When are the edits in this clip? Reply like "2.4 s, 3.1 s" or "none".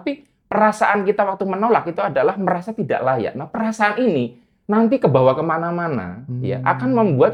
none